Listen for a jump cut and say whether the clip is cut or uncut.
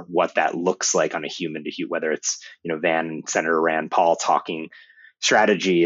uncut